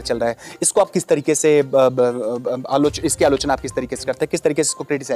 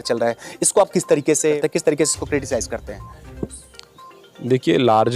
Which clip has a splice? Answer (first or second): second